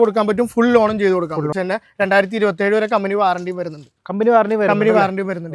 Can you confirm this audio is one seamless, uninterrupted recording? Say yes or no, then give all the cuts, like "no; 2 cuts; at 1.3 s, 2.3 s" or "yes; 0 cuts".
no; 1 cut; at 1.5 s